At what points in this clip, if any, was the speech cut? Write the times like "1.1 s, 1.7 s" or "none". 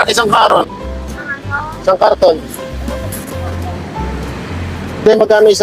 none